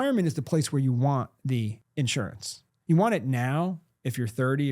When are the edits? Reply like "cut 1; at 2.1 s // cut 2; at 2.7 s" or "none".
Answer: cut 1; at 1.8 s